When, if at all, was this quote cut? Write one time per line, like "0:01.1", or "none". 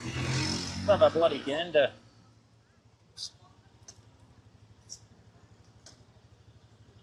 none